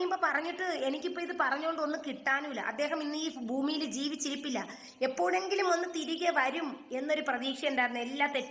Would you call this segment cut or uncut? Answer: uncut